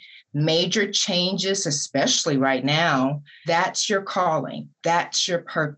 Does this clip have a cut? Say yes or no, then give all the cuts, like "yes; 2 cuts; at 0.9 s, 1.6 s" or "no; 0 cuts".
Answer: yes; 2 cuts; at 3.3 s, 4.6 s